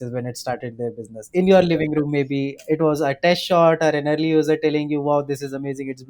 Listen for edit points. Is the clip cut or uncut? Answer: uncut